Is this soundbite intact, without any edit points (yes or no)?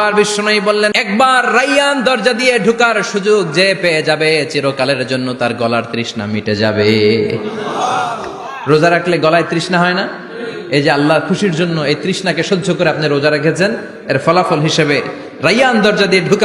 no